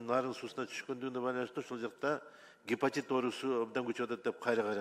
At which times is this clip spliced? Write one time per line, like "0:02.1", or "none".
none